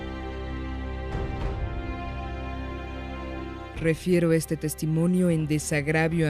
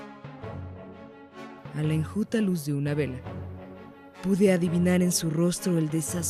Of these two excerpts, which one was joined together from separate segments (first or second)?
first